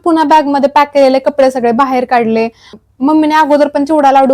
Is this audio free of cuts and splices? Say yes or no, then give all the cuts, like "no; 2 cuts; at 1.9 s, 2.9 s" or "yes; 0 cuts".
no; 1 cut; at 2.7 s